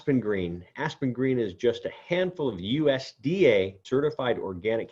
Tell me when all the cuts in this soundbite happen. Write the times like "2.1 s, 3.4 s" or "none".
3.8 s